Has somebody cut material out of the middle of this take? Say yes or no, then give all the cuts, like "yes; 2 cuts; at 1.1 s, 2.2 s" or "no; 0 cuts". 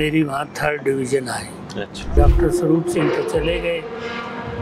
yes; 1 cut; at 2.1 s